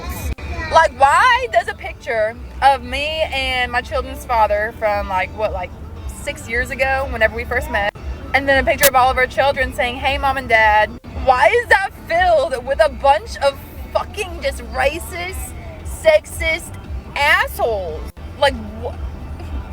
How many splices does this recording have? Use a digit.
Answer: 1